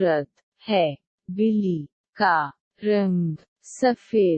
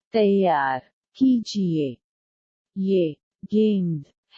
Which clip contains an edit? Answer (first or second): first